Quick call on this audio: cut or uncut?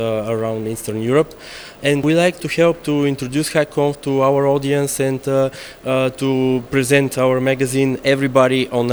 uncut